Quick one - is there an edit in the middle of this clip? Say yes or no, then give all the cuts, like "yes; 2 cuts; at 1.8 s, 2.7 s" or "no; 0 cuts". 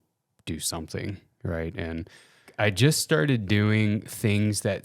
yes; 1 cut; at 2.5 s